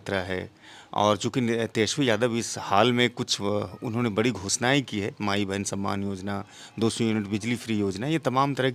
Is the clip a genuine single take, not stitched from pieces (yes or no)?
yes